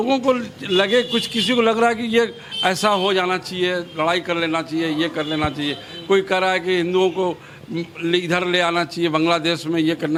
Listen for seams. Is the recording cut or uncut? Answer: uncut